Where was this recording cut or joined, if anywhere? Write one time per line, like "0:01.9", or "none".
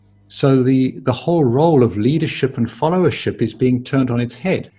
none